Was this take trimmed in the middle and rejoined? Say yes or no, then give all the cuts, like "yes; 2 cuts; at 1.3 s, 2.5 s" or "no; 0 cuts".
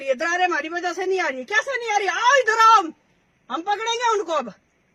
no; 0 cuts